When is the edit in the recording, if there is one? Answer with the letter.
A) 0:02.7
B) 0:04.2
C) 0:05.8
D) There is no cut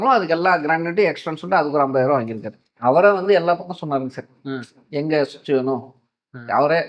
A